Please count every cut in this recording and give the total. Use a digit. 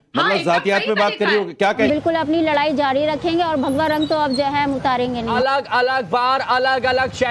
2